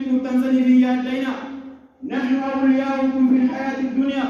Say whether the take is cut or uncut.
uncut